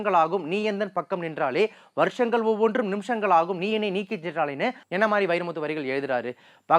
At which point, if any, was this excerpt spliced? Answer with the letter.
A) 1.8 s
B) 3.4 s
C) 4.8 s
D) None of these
C